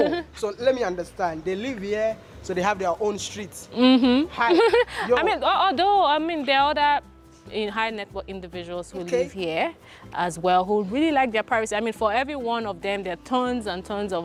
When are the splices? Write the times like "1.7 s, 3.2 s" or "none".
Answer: none

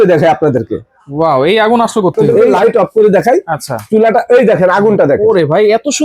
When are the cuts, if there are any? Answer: 2.5 s

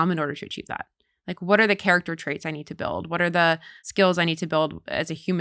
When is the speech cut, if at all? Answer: 3.8 s

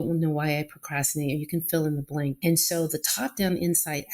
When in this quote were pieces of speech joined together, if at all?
2.4 s

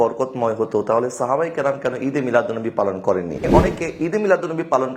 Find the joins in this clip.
3.5 s

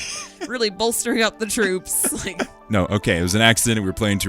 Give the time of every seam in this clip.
2.7 s

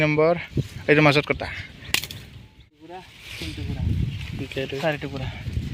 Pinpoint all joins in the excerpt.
2.9 s

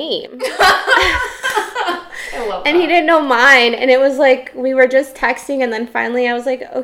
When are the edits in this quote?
none

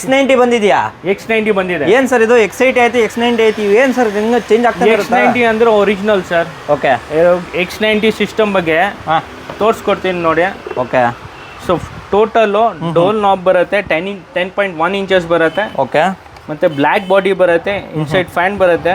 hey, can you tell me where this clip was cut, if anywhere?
none

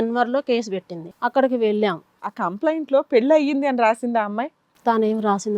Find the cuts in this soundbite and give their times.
2.1 s

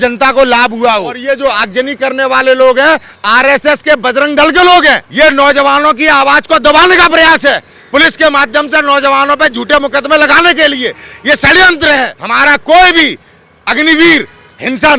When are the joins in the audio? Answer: 1.1 s, 5.1 s, 12.2 s

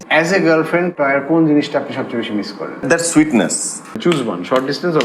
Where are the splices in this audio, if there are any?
0.9 s, 2.8 s, 4.0 s

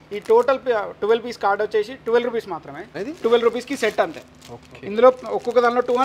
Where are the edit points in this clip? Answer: 3.0 s

